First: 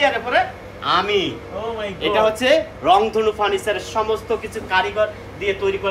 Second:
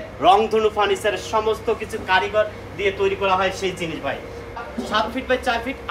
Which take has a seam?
second; 1 cut; at 4.6 s

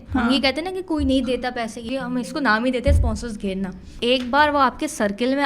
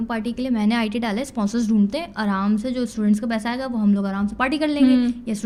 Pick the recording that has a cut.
first; 2 cuts; at 1.8 s, 3.9 s

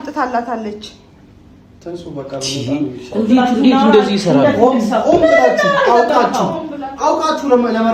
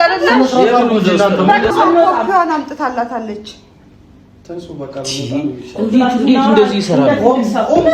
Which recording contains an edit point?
second; 1 cut; at 1.7 s

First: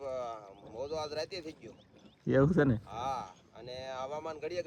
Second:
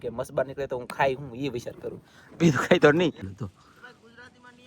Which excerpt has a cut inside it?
second; 1 cut; at 3.2 s

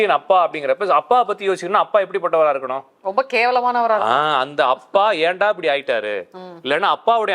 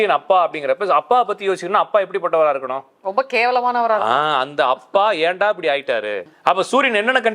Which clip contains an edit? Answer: second; 1 cut; at 6.2 s

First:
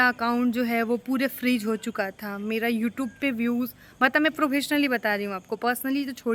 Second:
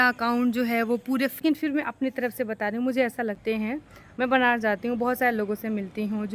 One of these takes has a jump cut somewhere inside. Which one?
second; 2 cuts; at 1.4 s, 3.4 s

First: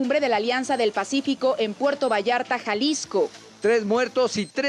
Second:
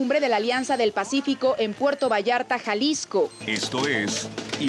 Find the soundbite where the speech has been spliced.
first; 1 cut; at 3.5 s

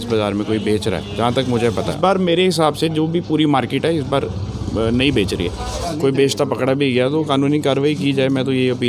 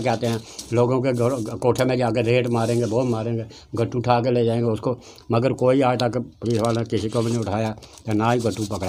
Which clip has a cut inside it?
first; 2 cuts; at 1.9 s, 5.7 s

